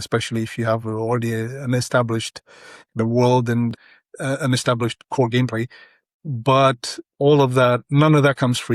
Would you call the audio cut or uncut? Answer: cut